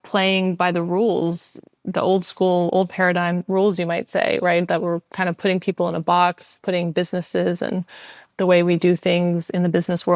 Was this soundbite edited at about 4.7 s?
no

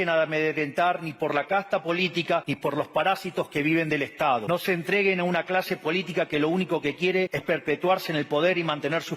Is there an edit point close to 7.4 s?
yes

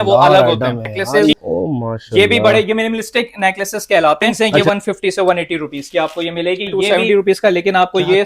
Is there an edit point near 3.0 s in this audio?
no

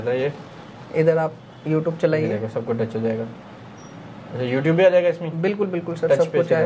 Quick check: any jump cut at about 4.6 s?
no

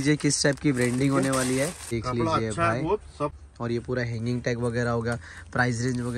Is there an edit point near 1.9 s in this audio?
yes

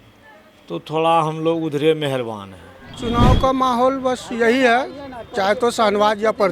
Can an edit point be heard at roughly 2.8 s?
yes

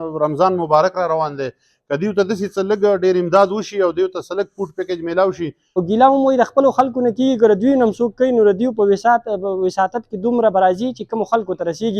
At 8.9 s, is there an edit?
no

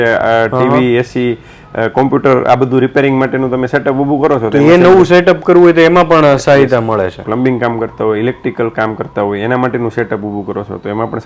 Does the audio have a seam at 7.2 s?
yes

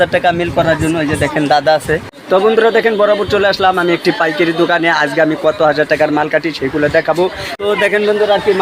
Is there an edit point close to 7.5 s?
yes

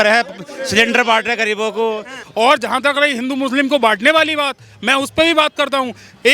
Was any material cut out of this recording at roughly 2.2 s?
yes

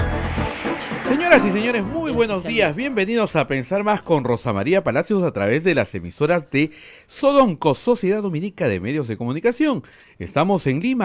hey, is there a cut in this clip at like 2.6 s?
no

